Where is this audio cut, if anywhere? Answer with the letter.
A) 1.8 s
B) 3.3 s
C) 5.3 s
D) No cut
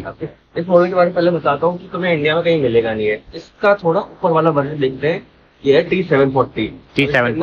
B